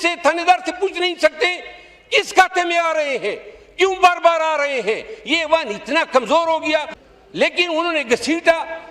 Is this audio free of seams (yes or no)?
no